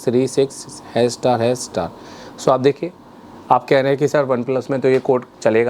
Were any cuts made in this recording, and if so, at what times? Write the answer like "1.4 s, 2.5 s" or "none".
none